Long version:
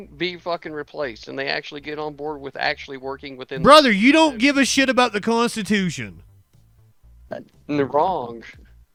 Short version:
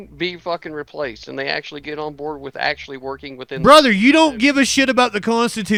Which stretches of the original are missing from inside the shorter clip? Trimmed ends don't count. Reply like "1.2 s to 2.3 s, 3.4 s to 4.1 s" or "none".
none

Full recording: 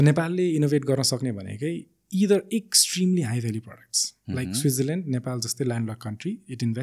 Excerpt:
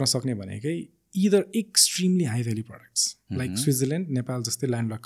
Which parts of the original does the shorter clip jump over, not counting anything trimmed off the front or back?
none

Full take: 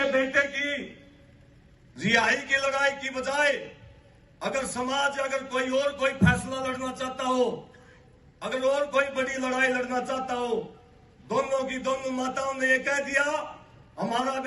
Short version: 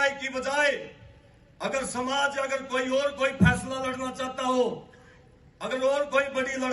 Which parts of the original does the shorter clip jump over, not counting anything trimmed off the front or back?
none

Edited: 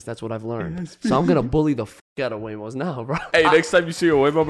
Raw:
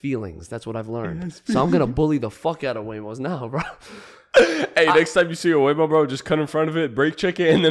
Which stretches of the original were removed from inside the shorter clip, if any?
3.7 s to 4.7 s

